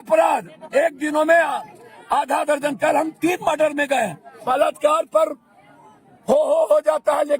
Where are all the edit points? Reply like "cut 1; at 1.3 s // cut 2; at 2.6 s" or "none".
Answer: cut 1; at 4.3 s

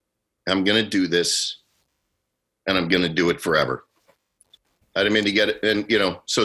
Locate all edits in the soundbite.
cut 1; at 4.7 s

